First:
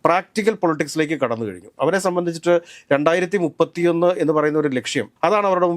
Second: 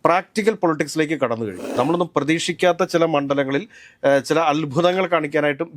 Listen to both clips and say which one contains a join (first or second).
second